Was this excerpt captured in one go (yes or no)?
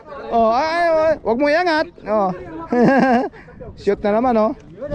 yes